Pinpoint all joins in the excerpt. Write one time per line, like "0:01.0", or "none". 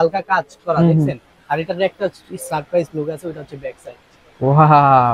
none

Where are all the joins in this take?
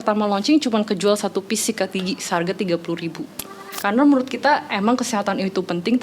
0:03.6

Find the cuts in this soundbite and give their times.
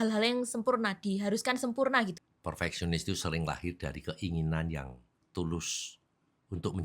0:02.1

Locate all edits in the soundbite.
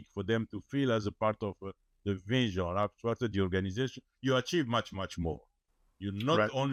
none

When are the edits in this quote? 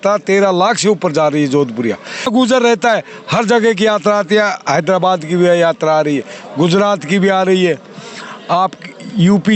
0:02.3

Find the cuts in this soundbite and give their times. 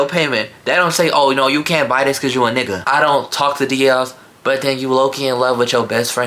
0:02.8

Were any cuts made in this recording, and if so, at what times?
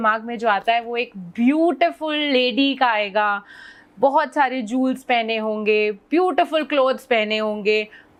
none

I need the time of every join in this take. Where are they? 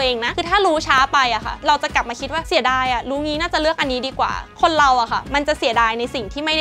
0:04.4

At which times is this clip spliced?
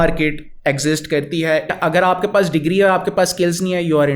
0:01.7

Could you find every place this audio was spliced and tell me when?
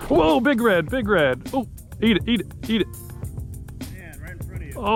none

